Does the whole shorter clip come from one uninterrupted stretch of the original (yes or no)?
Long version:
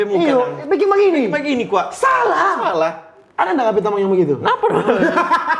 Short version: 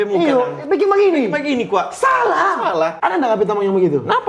no